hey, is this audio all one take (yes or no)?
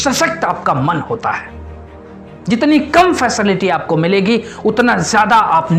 yes